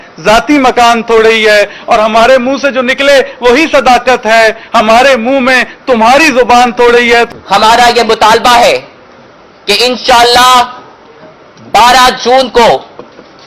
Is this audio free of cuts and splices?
no; 1 cut; at 7.3 s

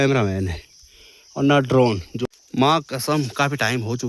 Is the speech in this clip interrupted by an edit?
yes; 1 cut; at 2.1 s

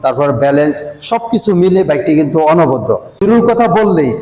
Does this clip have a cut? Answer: yes; 1 cut; at 3.2 s

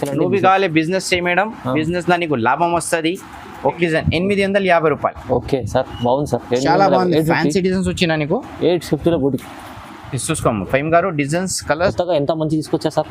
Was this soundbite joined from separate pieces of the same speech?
yes; 2 cuts; at 3.8 s, 11.9 s

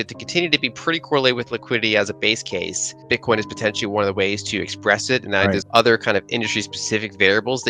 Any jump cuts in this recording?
yes; 2 cuts; at 2.9 s, 5.6 s

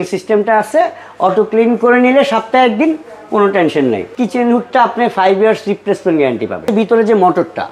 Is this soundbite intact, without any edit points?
no; 2 cuts; at 4.1 s, 6.7 s

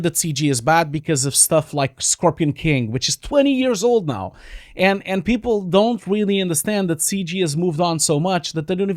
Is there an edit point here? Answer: no; 0 cuts

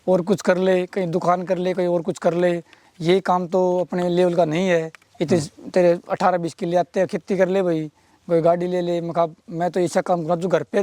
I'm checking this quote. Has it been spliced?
yes; 1 cut; at 5.0 s

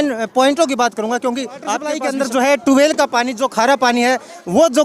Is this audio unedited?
no; 1 cut; at 1.9 s

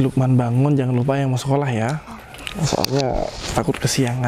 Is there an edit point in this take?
no; 0 cuts

